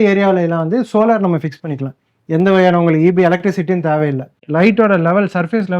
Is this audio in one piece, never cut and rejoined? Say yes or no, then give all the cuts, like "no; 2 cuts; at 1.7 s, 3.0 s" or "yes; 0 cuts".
no; 1 cut; at 4.3 s